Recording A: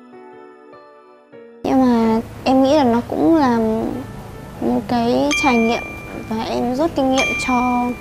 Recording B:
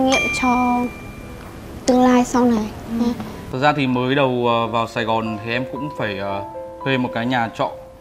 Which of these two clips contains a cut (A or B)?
B